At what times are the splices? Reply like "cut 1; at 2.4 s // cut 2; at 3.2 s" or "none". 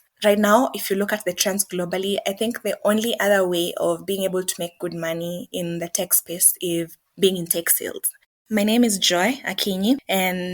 cut 1; at 8.3 s